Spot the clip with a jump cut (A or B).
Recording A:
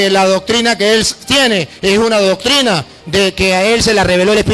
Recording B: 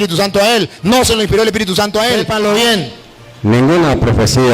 B